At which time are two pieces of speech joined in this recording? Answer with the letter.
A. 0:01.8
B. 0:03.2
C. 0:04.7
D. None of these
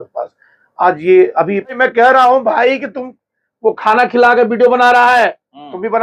A